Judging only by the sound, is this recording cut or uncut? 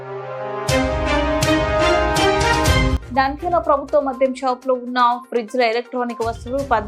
cut